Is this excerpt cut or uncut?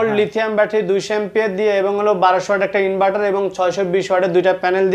uncut